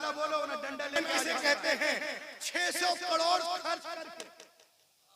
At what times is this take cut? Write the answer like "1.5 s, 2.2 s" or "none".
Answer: 1.2 s